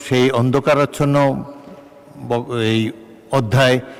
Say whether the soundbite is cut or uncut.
uncut